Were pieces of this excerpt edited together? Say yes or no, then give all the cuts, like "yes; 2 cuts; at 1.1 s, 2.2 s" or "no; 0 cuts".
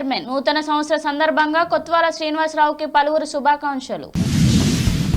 yes; 1 cut; at 4.0 s